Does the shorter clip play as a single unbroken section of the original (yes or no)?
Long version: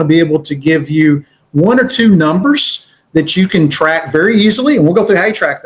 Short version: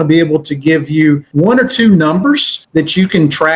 no